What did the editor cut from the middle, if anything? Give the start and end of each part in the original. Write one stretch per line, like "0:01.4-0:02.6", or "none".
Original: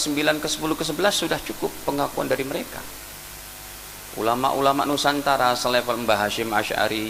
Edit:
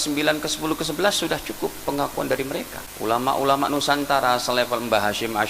0:02.8-0:04.0